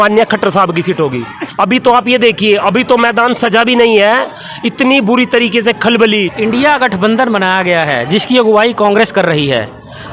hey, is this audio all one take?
no; 2 cuts; at 1.4 s, 6.3 s

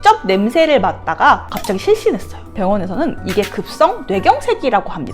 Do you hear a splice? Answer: yes; 1 cut; at 2.6 s

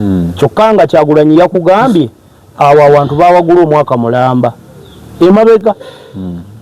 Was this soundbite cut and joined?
no; 0 cuts

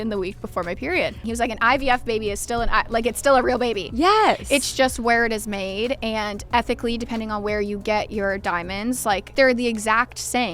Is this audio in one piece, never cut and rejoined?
no; 2 cuts; at 1.2 s, 9.3 s

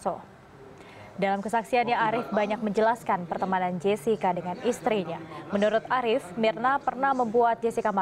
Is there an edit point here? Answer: yes; 1 cut; at 2.7 s

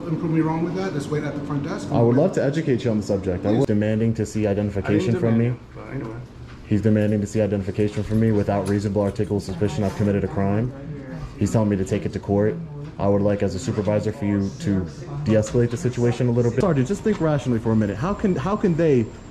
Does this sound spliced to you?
yes; 2 cuts; at 3.6 s, 16.6 s

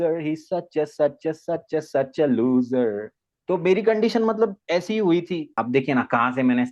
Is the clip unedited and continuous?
no; 1 cut; at 5.5 s

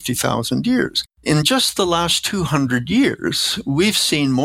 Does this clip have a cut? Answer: yes; 1 cut; at 1.1 s

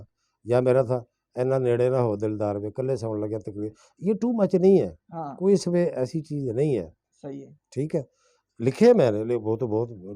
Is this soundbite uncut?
yes; 0 cuts

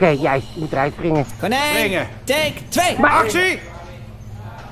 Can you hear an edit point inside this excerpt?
yes; 1 cut; at 3.6 s

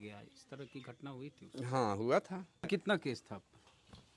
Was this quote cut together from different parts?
yes; 1 cut; at 2.7 s

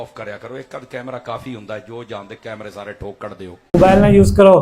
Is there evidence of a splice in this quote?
yes; 1 cut; at 3.7 s

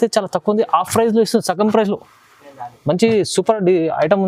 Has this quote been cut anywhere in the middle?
no; 0 cuts

